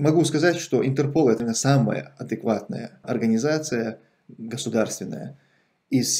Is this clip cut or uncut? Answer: cut